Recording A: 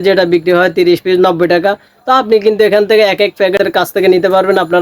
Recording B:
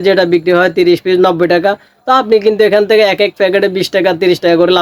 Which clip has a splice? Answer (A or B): A